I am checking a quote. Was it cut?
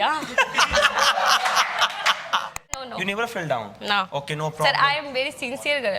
yes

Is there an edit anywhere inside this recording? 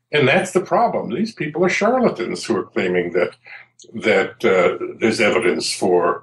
no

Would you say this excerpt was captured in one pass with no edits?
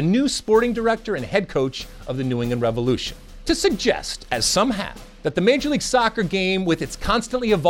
no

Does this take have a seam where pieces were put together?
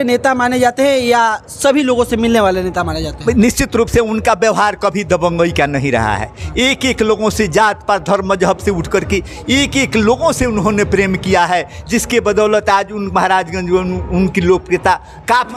no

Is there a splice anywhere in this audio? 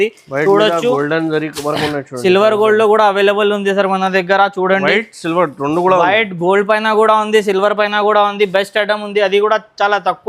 no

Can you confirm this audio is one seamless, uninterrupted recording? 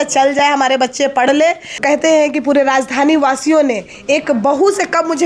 no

